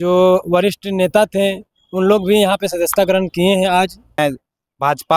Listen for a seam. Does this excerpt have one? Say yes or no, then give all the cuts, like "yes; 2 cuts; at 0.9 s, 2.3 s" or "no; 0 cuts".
yes; 1 cut; at 4.2 s